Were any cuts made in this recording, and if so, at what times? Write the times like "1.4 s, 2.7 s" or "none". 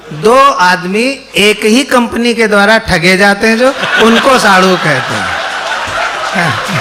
none

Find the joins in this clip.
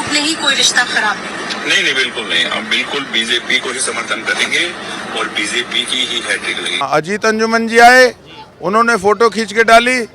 6.8 s

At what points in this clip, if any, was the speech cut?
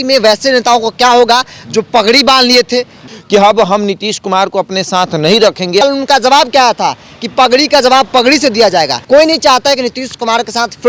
3.0 s, 5.8 s, 9.0 s

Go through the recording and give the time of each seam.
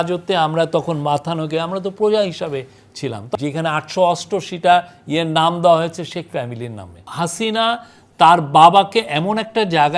3.3 s, 7.0 s

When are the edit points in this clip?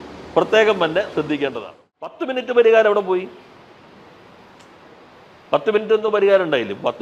2.2 s

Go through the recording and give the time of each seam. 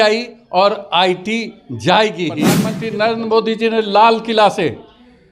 2.8 s

